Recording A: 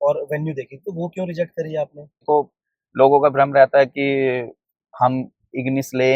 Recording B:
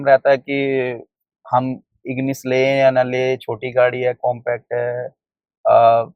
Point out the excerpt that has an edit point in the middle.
A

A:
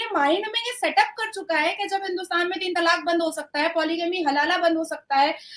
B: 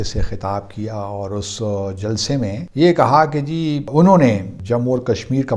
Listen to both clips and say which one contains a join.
B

